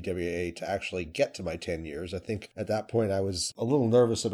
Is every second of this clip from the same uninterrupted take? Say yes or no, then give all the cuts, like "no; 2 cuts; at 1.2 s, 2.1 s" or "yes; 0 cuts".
no; 1 cut; at 3.4 s